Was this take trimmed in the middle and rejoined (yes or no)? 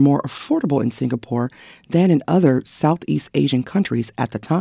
no